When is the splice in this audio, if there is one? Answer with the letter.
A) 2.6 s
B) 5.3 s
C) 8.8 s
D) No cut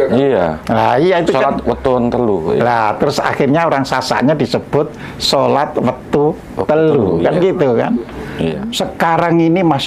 C